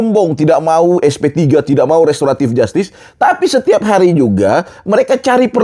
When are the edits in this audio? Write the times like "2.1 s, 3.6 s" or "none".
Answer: none